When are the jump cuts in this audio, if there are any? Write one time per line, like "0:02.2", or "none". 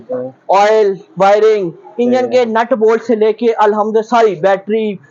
none